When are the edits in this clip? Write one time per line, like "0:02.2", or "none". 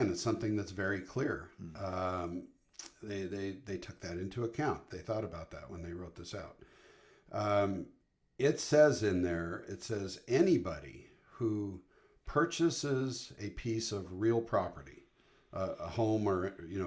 none